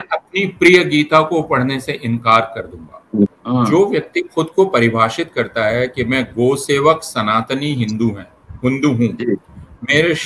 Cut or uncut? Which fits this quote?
cut